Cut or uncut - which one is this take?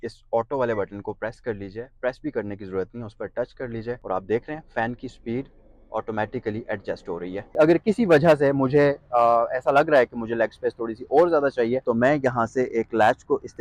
cut